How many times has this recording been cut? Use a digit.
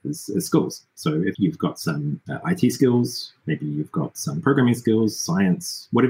2